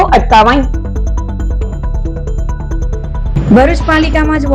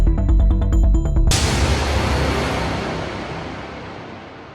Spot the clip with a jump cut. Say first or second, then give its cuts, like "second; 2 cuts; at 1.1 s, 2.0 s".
second; 1 cut; at 1.3 s